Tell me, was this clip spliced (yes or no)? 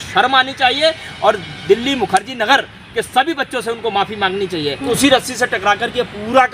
yes